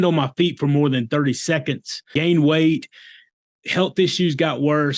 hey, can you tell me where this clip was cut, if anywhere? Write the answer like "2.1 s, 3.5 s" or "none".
2.1 s